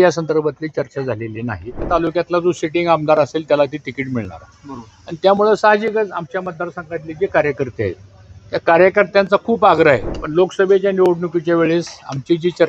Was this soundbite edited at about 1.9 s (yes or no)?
yes